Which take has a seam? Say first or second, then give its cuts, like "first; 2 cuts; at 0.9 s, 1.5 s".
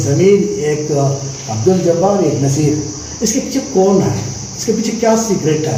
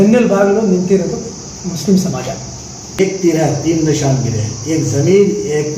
second; 1 cut; at 3.0 s